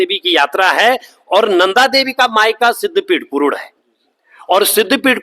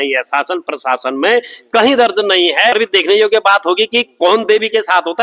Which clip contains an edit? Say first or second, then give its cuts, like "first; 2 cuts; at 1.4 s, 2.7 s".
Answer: second; 1 cut; at 2.8 s